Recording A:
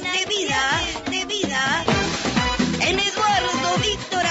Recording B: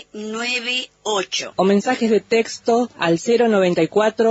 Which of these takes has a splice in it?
B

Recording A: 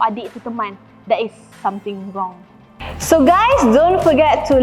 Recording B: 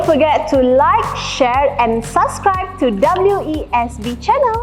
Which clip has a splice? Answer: A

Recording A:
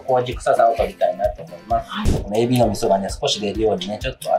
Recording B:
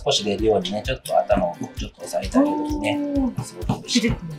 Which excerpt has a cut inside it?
A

